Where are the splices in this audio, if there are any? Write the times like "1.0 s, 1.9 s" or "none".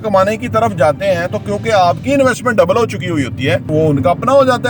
3.7 s